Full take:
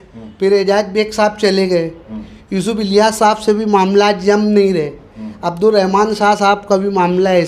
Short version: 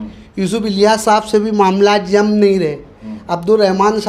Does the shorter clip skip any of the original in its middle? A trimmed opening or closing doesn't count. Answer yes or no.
no